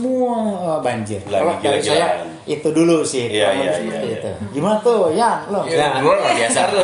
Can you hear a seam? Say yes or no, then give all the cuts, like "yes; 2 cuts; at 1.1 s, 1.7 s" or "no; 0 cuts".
no; 0 cuts